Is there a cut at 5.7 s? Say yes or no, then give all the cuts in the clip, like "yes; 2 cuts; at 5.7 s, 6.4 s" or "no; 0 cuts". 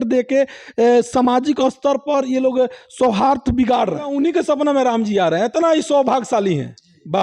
no; 1 cut; at 4.1 s